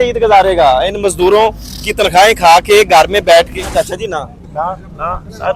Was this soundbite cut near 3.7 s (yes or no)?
yes